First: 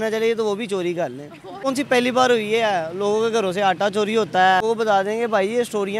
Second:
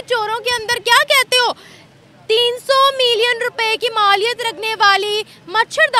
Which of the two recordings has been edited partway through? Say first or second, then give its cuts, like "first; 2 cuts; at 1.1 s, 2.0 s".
first; 2 cuts; at 1.7 s, 4.6 s